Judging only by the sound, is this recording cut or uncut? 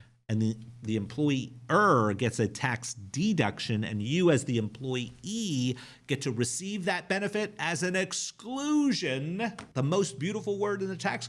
cut